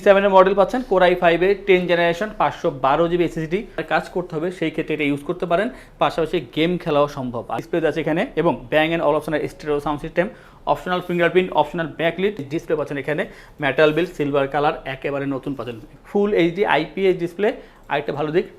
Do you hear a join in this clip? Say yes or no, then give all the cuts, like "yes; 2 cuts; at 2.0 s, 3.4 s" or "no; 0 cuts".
yes; 4 cuts; at 3.8 s, 7.6 s, 12.4 s, 15.9 s